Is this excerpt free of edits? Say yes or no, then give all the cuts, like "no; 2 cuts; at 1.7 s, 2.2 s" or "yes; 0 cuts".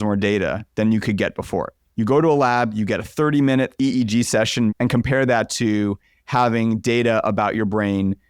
no; 2 cuts; at 3.7 s, 4.7 s